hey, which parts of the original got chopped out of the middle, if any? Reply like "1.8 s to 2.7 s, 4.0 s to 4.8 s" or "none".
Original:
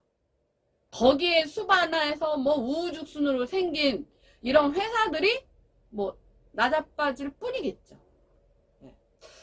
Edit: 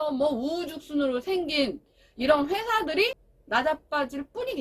5.6 s to 6.4 s

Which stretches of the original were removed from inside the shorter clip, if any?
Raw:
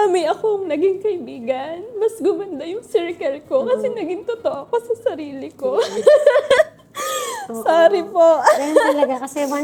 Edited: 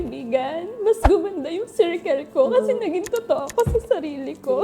none

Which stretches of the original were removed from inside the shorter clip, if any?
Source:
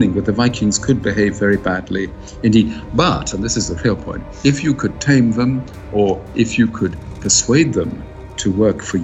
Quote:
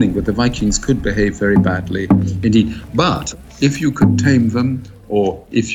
3.3 s to 4.2 s

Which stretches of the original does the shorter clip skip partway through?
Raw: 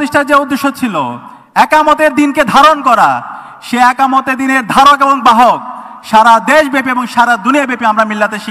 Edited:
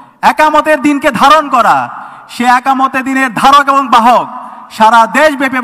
none

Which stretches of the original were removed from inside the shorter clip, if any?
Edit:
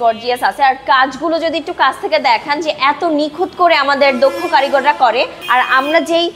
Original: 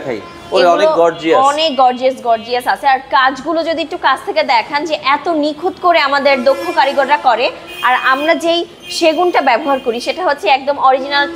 7.6 s to 7.7 s

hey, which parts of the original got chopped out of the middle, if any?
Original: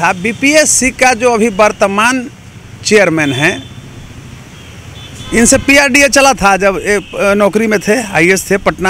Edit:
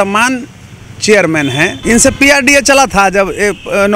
3.6 s to 5.2 s

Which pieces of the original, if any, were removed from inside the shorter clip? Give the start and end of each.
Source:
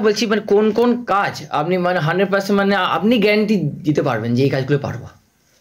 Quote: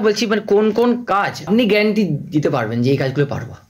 1.4 s to 2.9 s

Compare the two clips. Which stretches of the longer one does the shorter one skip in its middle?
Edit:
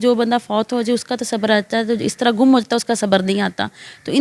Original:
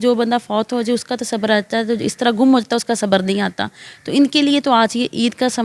none

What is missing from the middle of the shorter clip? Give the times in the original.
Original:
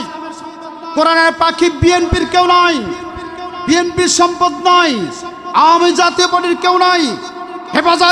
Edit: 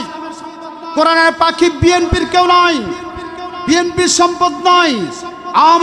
none

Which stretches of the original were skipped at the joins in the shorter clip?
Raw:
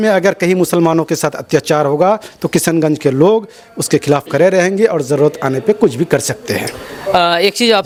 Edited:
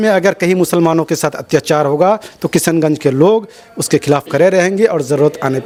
none

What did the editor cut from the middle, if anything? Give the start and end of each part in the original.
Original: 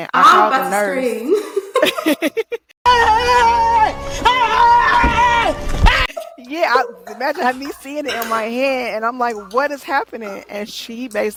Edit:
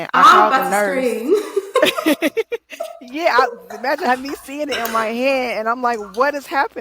2.7 s to 6.1 s

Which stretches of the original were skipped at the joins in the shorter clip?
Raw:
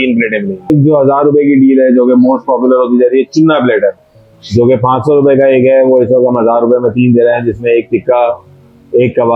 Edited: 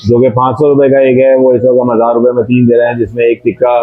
none

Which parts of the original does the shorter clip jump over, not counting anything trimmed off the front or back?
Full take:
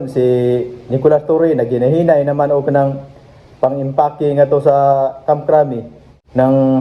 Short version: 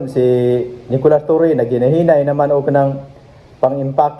none

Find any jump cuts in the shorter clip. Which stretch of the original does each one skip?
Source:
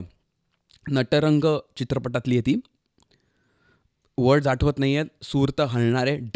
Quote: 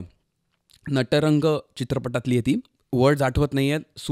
2.8 s to 4.0 s

